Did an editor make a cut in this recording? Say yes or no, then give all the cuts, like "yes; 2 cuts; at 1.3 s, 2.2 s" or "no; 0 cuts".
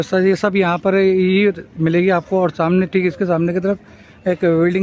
no; 0 cuts